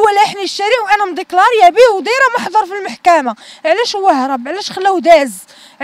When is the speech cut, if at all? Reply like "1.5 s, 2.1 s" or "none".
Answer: none